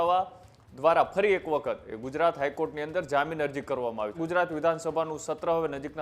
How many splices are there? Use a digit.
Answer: 1